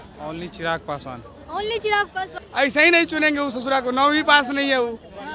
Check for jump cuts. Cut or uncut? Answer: cut